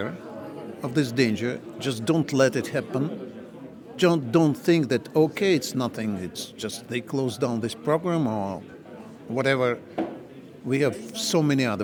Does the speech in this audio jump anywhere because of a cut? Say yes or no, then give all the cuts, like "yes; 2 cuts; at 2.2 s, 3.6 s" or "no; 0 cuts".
no; 0 cuts